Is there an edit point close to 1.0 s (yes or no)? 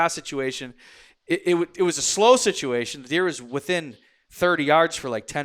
no